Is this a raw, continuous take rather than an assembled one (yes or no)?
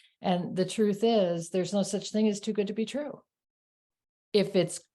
yes